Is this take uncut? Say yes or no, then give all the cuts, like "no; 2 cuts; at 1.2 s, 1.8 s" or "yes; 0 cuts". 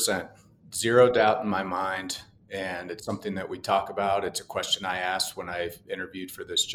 yes; 0 cuts